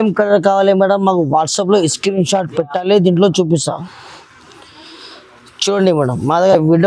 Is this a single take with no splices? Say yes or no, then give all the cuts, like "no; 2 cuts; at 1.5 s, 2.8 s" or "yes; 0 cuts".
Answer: yes; 0 cuts